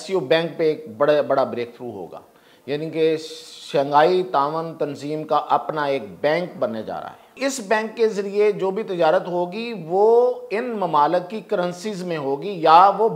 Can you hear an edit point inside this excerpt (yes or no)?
yes